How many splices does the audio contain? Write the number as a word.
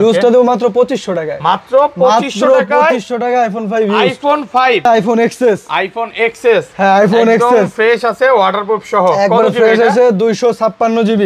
one